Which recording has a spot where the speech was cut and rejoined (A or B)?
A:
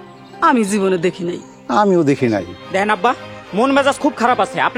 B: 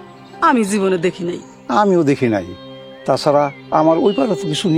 A